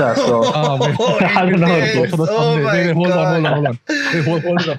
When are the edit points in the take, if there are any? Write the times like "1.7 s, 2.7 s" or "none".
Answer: none